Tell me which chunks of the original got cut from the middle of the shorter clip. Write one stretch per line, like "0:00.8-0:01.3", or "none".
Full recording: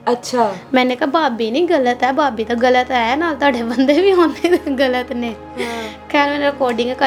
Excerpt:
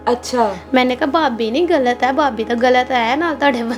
none